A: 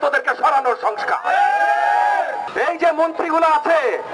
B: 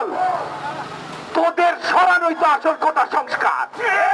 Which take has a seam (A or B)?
A